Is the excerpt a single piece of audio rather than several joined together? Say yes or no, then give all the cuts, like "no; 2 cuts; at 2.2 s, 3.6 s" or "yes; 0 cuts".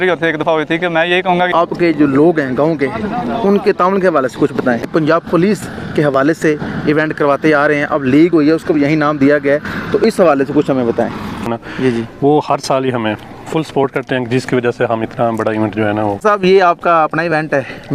no; 4 cuts; at 1.5 s, 4.9 s, 11.6 s, 16.2 s